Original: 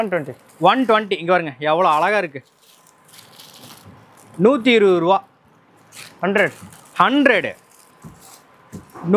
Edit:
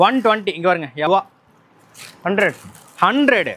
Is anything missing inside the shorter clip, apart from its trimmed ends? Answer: yes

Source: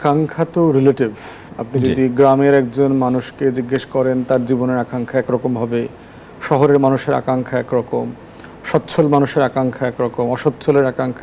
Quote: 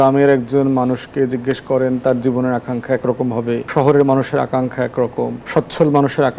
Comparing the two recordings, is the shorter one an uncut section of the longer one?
no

